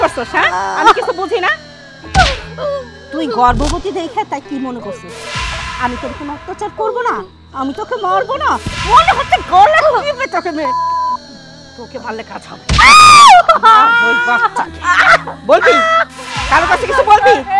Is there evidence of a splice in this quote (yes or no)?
no